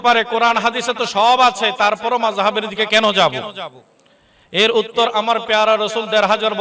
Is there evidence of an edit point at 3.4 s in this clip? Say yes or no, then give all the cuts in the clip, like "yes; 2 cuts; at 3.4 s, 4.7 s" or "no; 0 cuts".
no; 0 cuts